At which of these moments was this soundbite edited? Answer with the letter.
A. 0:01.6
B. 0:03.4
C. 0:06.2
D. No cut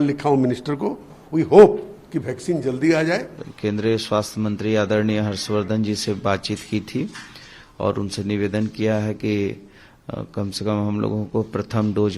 B